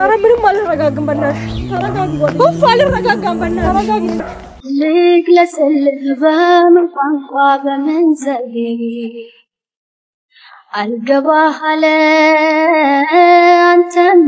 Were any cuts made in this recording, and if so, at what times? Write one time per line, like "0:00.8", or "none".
0:04.2